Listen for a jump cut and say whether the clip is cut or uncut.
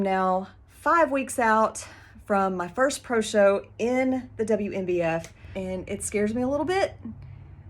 cut